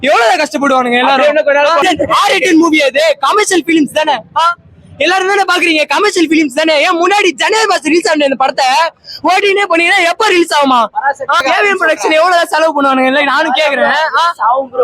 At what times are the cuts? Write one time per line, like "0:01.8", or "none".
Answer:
0:01.8
0:11.4